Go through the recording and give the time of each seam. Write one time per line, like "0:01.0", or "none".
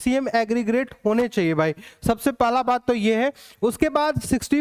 none